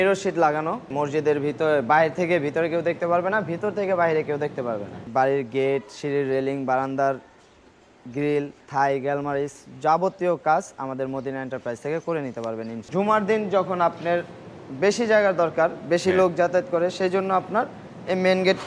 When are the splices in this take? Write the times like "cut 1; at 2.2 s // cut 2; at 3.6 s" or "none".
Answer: cut 1; at 0.9 s // cut 2; at 5.1 s // cut 3; at 8.6 s // cut 4; at 12.8 s